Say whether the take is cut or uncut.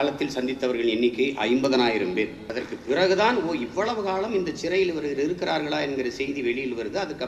uncut